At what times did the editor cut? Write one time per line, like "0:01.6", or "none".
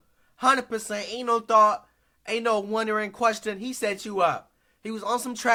none